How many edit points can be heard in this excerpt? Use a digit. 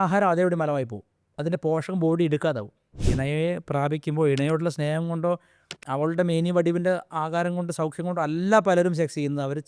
1